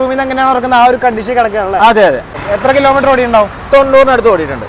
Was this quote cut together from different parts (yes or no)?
yes